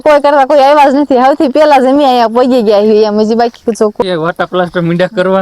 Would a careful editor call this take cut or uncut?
cut